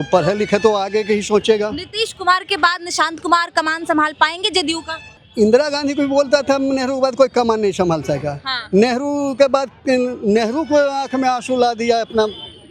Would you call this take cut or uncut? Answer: cut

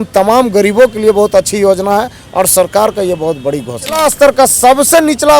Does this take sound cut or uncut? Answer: cut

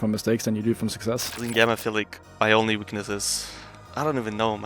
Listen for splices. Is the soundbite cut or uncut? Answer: cut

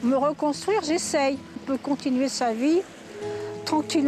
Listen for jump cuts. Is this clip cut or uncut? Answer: cut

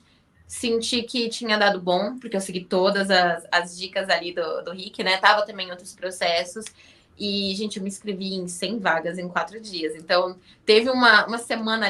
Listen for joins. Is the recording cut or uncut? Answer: uncut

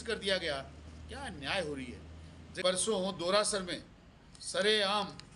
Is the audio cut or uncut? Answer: cut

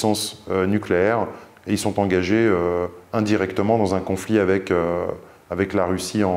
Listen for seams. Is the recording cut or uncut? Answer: uncut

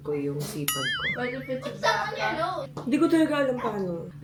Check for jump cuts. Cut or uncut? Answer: uncut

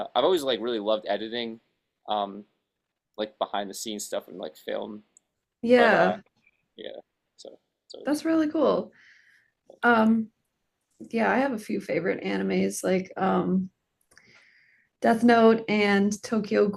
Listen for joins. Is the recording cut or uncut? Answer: uncut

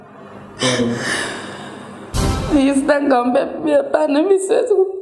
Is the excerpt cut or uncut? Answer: cut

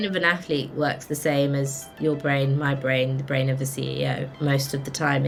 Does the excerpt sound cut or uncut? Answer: uncut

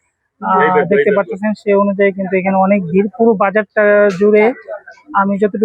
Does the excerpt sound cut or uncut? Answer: uncut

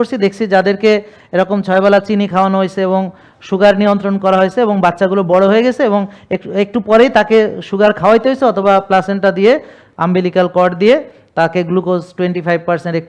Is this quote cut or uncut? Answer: uncut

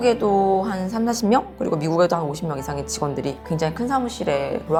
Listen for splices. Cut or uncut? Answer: uncut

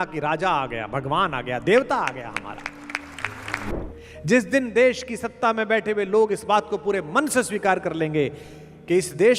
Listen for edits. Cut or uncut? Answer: cut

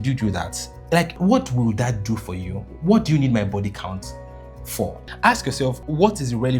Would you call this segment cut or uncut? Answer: cut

